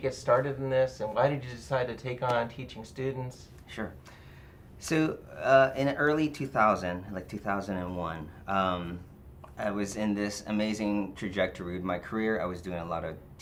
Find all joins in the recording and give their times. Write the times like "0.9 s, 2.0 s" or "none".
none